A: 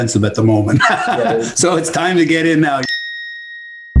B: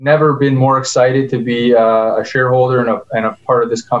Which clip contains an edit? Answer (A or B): A